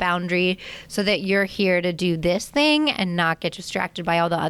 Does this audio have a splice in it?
no; 0 cuts

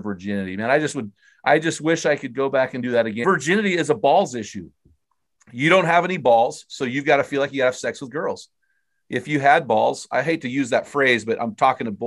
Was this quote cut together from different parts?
yes; 1 cut; at 3.2 s

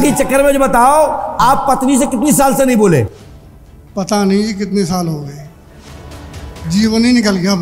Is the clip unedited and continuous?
yes; 0 cuts

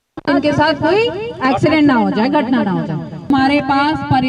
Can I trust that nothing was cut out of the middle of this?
no; 1 cut; at 3.3 s

